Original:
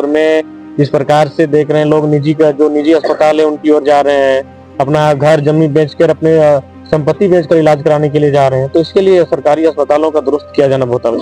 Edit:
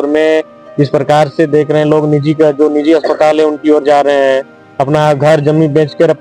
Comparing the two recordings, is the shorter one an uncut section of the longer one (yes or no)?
yes